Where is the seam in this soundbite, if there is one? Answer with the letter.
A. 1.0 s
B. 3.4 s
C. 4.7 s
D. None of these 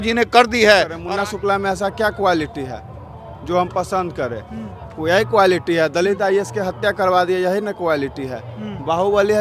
A